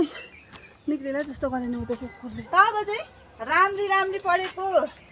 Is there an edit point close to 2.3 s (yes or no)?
yes